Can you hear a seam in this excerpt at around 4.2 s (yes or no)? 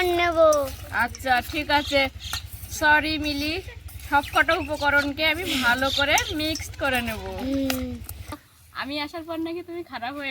no